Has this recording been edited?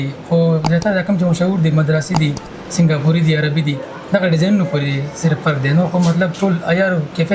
no; 0 cuts

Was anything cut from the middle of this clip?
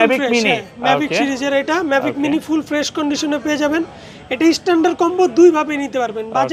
no; 0 cuts

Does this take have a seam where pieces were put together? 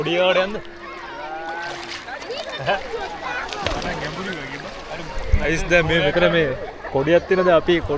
no; 0 cuts

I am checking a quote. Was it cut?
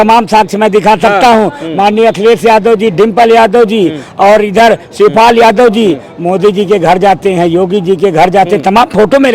no; 0 cuts

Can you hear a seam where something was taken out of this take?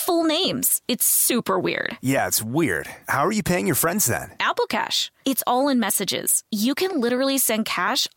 no; 0 cuts

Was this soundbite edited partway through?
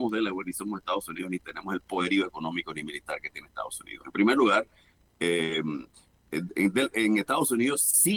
no; 0 cuts

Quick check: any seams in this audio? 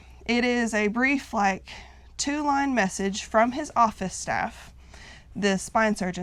no; 0 cuts

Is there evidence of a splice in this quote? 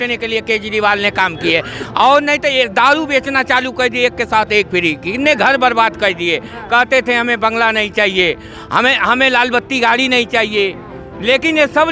no; 0 cuts

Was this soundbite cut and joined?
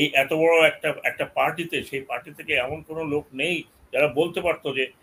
no; 0 cuts

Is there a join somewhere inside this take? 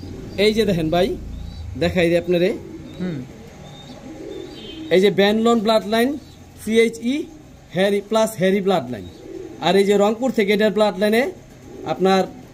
no; 0 cuts

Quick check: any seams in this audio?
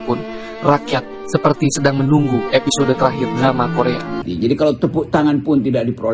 yes; 1 cut; at 4.2 s

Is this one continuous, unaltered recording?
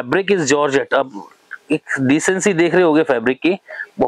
yes; 0 cuts

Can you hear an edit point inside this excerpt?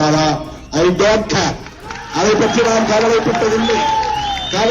no; 0 cuts

